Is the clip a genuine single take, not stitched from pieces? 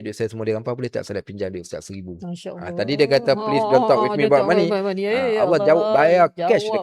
yes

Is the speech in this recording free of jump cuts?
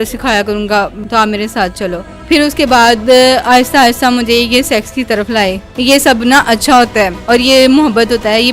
no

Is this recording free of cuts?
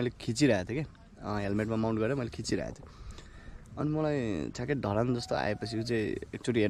yes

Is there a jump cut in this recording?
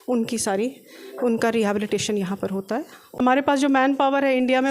yes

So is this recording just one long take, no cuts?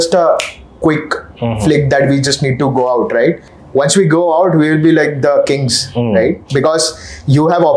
no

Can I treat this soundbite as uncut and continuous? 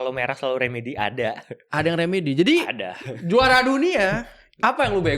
yes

